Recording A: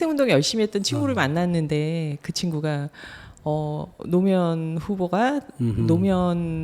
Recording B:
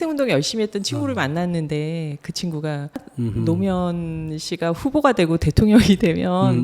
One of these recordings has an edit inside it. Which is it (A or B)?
B